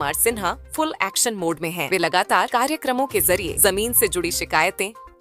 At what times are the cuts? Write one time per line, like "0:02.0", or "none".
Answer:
none